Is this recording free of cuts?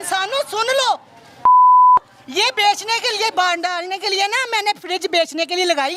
yes; 0 cuts

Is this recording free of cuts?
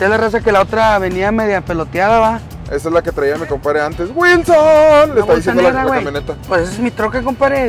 no; 2 cuts; at 2.6 s, 6.5 s

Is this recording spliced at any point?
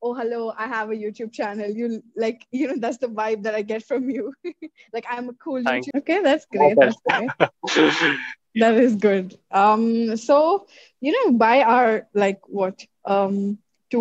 yes; 1 cut; at 5.9 s

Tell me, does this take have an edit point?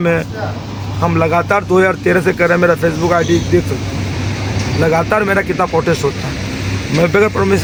no; 0 cuts

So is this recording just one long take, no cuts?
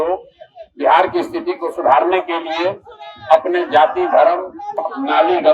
yes; 0 cuts

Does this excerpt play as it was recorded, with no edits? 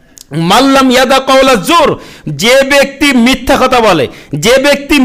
yes; 0 cuts

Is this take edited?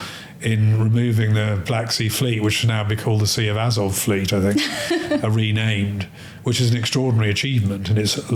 no; 0 cuts

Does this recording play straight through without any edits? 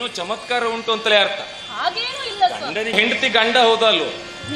no; 1 cut; at 3.0 s

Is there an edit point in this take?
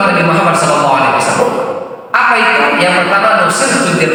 no; 0 cuts

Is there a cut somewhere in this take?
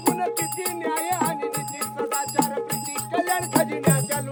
no; 0 cuts

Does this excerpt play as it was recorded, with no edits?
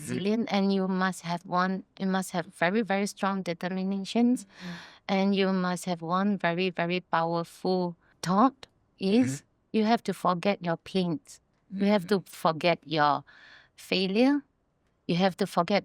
yes; 0 cuts

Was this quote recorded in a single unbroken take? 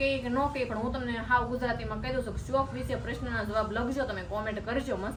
yes; 0 cuts

